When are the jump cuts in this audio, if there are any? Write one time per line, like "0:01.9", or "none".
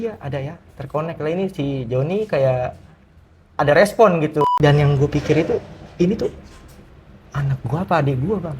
0:04.5